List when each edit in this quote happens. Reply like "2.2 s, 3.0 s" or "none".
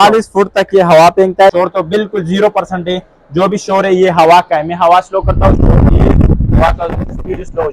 1.5 s